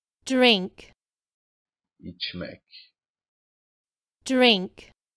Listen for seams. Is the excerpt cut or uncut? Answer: uncut